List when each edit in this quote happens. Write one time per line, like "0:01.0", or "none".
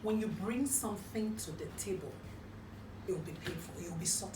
0:02.3